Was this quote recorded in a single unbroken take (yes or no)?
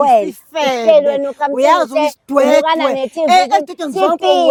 yes